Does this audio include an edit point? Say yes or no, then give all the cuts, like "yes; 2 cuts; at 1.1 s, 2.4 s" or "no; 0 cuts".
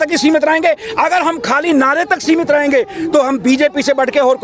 no; 0 cuts